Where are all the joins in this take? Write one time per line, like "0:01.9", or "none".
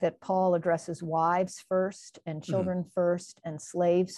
none

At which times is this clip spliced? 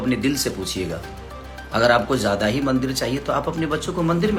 none

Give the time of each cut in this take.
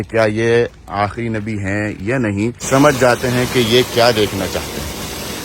0:02.6

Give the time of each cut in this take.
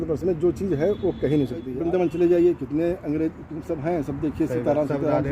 0:01.7

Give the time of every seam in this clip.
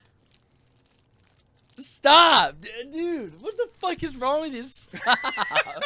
none

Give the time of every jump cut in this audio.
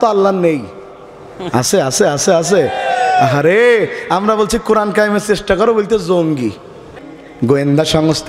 0:07.0

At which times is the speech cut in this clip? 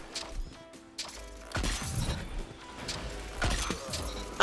0:02.8

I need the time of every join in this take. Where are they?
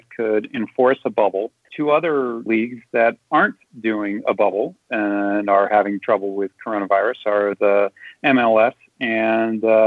0:01.6

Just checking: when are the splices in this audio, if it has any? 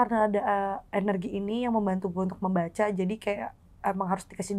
none

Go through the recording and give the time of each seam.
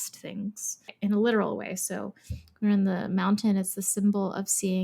0:00.9

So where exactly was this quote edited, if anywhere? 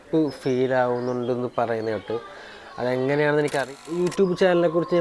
0:03.6

